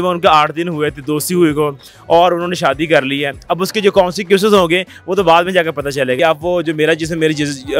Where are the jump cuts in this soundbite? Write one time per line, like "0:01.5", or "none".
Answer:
0:06.2

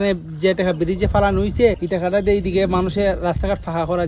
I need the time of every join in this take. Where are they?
0:01.8

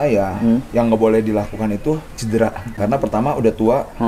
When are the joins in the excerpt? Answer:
0:02.7

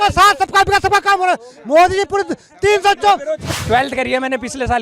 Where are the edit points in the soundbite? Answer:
0:03.5

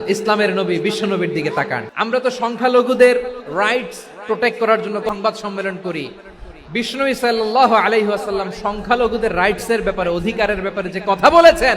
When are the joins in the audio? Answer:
0:01.8
0:05.1

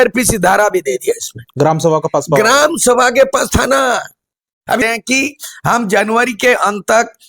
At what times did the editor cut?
0:04.8

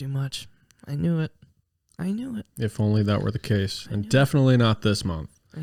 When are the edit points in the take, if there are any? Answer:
none

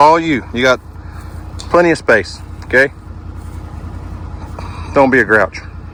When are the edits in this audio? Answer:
none

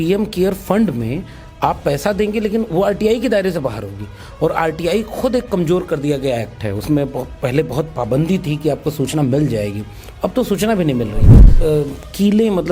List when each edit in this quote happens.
0:11.5

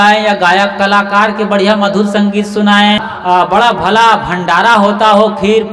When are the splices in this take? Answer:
0:03.0

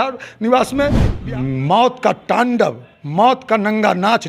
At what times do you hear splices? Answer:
0:01.1

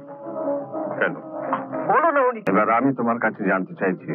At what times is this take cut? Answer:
0:02.4

